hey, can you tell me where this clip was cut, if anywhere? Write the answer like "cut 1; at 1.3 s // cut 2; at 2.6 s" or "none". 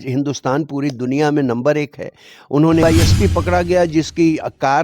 cut 1; at 2.8 s